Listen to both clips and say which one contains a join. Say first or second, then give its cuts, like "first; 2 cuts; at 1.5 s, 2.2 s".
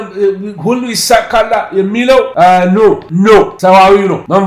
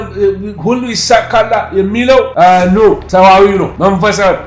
second; 1 cut; at 3.0 s